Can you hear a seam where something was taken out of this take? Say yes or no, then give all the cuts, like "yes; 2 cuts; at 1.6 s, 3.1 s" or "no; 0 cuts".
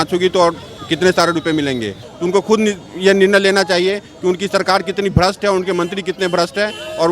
yes; 1 cut; at 2.1 s